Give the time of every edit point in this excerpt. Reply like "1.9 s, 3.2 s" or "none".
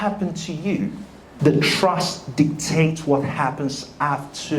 1.2 s